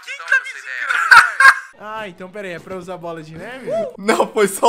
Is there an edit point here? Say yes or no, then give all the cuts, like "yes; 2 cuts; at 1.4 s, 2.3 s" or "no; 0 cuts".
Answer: yes; 1 cut; at 1.6 s